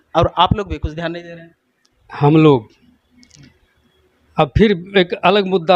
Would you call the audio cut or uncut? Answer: uncut